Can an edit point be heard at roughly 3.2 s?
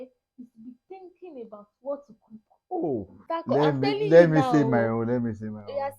yes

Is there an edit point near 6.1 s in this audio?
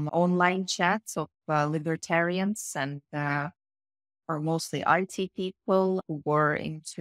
yes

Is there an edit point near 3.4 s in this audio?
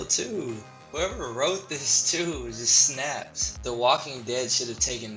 yes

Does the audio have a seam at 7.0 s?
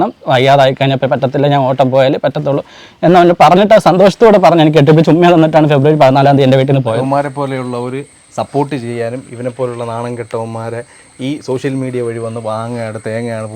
yes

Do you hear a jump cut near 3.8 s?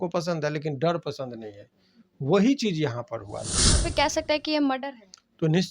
yes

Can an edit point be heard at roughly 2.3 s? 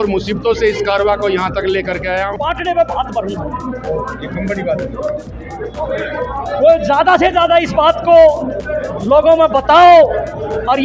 yes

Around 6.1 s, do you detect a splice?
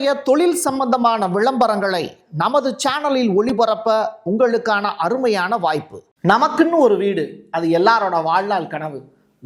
yes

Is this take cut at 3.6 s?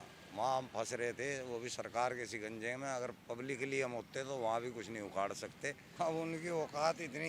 no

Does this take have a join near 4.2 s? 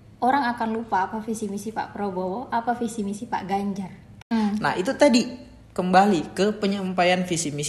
yes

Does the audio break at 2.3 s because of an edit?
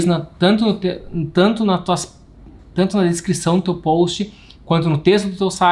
no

